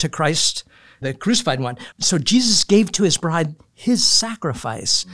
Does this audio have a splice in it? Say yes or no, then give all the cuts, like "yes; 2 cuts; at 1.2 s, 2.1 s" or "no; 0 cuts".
yes; 2 cuts; at 1.0 s, 1.8 s